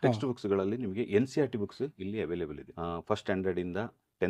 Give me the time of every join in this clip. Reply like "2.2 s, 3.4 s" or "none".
2.6 s